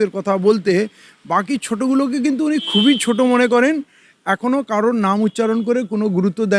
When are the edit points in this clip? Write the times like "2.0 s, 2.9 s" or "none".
none